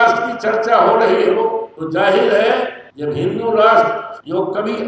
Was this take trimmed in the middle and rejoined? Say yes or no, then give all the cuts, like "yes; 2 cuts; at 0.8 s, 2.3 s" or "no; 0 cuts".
no; 0 cuts